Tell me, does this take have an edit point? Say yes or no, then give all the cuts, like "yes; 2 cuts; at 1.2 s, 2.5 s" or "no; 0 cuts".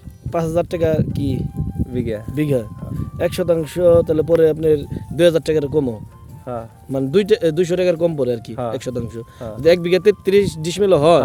no; 0 cuts